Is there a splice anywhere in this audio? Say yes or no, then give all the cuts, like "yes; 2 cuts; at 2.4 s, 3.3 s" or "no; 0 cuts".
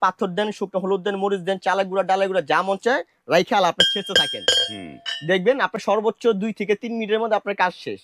no; 0 cuts